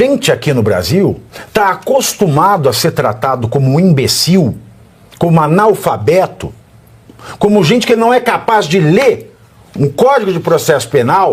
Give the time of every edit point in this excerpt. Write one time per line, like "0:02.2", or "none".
0:01.3

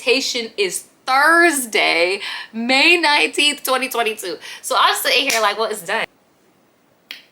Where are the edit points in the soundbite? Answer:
0:06.0

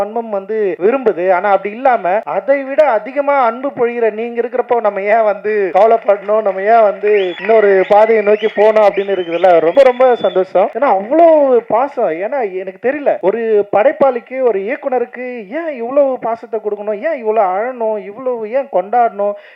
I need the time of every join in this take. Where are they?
0:00.8
0:02.3
0:05.7
0:07.3
0:09.7
0:10.7
0:13.2

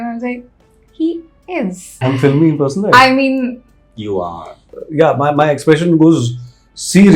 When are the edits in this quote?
0:01.9
0:04.6

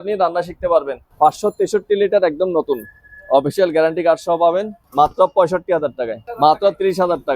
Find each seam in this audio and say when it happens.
0:01.0
0:04.8
0:06.2

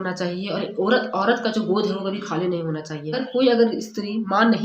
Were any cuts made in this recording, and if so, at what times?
0:03.2

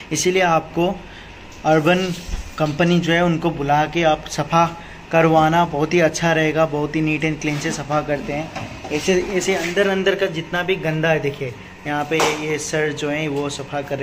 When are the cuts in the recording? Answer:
none

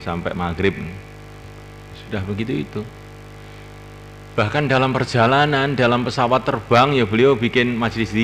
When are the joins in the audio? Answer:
none

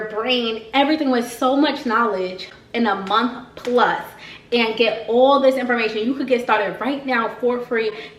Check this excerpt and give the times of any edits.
none

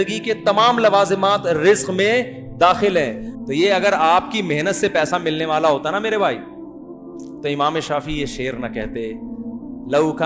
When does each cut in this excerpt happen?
0:03.3

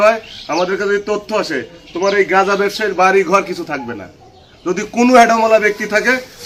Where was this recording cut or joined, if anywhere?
none

